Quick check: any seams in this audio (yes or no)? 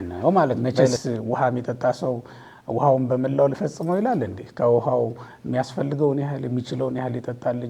yes